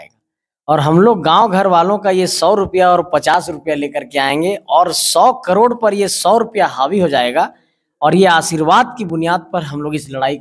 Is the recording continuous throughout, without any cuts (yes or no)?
yes